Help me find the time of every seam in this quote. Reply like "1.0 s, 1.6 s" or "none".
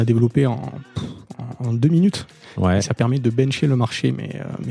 2.4 s